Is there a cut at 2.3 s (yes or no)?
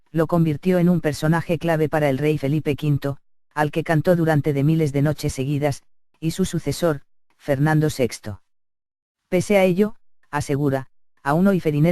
no